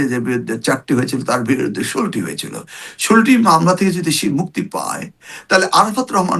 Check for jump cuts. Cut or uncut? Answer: uncut